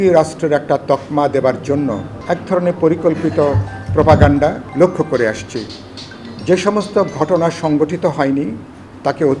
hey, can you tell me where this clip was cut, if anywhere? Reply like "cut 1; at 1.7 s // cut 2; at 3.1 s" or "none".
cut 1; at 2.1 s // cut 2; at 4.6 s